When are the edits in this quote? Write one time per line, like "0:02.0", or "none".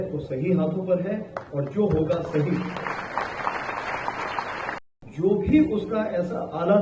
0:04.8

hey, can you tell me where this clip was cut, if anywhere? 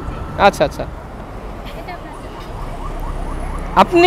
0:01.0

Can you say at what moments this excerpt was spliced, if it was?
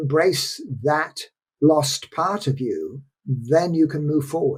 none

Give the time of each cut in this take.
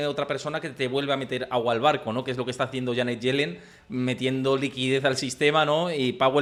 none

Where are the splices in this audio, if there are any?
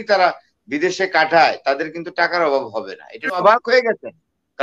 0:03.4

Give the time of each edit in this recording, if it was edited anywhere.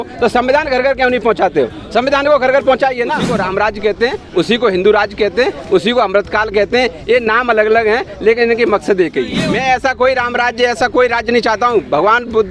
0:03.3
0:09.4

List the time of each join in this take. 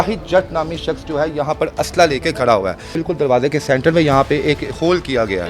0:02.9

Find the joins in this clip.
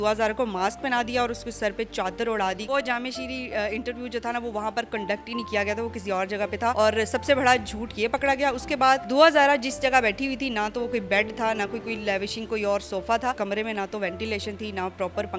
0:02.6
0:06.7
0:09.1
0:13.4

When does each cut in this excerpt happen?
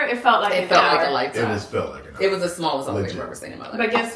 none

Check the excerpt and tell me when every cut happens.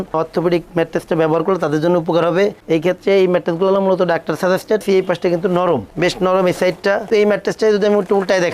0:04.8
0:07.1

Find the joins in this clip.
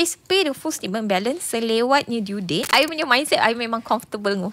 0:02.7

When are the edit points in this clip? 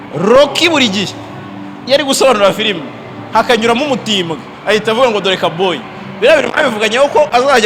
none

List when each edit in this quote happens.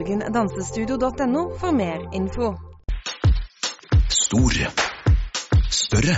0:02.9

